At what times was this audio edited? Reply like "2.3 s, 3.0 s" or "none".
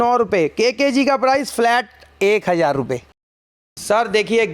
3.3 s